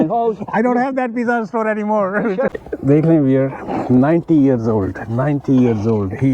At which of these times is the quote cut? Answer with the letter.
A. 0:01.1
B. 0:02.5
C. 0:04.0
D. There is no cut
B